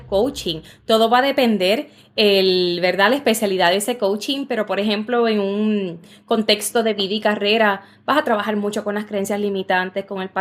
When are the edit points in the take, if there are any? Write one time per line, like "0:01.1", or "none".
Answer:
none

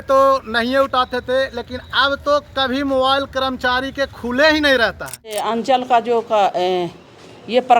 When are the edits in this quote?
0:05.4

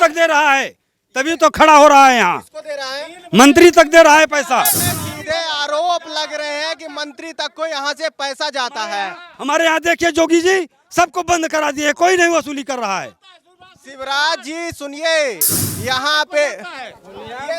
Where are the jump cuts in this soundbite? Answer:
0:04.9

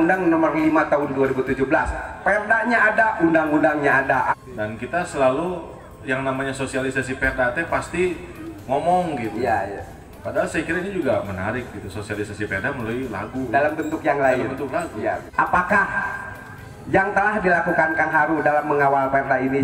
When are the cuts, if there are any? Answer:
0:04.3
0:15.2

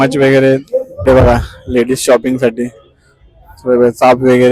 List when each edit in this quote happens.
0:00.9

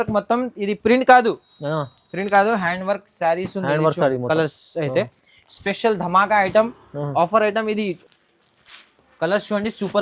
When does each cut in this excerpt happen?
0:08.0

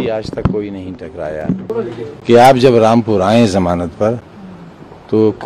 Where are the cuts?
0:01.6

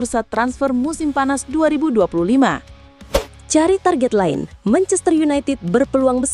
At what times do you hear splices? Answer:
0:03.3

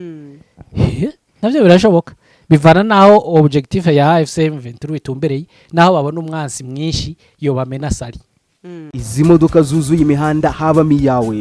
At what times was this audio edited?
0:08.9

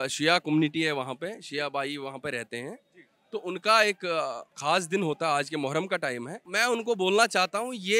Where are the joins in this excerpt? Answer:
none

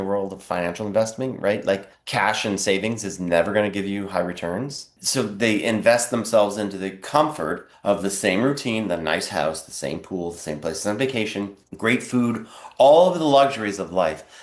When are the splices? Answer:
0:02.0
0:05.0
0:07.7
0:11.6

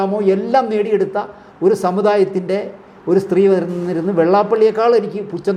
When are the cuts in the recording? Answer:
none

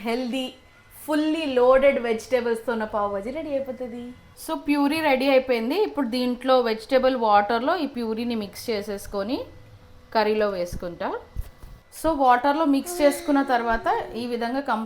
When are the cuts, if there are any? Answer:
none

